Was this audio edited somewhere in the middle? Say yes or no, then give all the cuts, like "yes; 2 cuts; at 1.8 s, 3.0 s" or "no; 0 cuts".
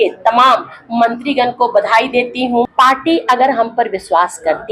yes; 1 cut; at 2.7 s